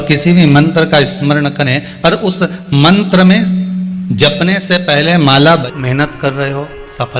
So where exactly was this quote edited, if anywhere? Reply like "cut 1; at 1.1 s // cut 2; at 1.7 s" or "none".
cut 1; at 5.6 s